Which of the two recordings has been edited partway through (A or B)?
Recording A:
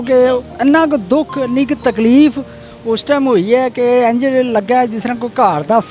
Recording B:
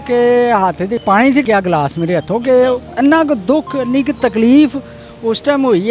B